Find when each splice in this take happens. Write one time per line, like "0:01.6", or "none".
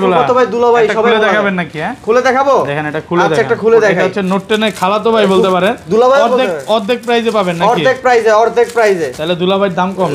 none